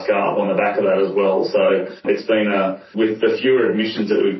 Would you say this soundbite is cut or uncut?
cut